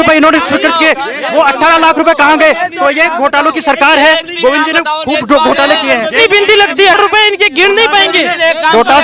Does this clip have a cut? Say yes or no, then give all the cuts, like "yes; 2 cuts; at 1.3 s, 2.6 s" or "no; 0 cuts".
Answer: yes; 1 cut; at 6.1 s